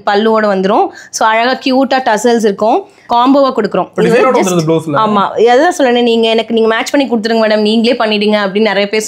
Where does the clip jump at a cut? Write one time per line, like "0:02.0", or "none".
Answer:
0:03.1